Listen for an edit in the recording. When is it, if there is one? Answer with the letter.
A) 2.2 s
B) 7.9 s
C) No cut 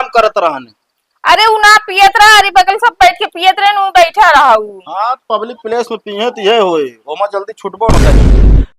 B